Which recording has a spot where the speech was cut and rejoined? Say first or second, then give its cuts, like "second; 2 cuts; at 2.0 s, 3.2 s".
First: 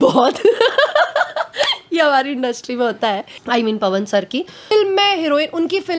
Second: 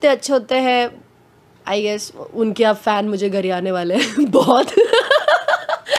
first; 2 cuts; at 3.3 s, 4.7 s